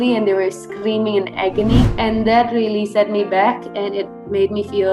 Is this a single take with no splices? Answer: no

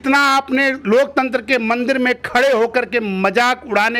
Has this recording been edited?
no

